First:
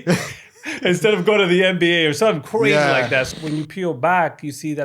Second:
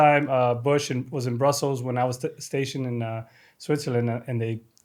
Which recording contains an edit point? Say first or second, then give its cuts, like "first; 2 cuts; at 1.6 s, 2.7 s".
first; 1 cut; at 3.3 s